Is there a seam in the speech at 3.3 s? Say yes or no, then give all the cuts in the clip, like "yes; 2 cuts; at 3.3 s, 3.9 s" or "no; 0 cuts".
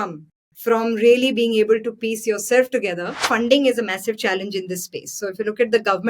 yes; 1 cut; at 3.3 s